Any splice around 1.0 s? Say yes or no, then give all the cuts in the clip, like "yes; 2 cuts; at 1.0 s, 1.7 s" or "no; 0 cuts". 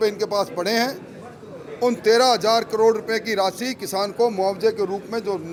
no; 0 cuts